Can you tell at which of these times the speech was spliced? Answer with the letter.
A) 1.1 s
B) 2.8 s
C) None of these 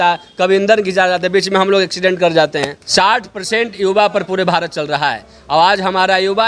B